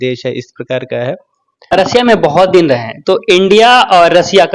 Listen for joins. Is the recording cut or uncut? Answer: cut